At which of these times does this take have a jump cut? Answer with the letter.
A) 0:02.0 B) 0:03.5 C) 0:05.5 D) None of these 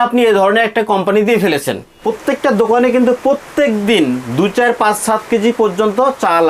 A